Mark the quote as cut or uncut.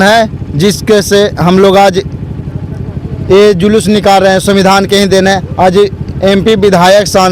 uncut